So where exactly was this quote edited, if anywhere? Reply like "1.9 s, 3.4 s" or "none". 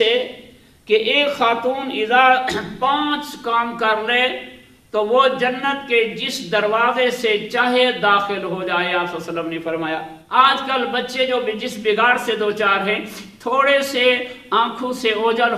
10.2 s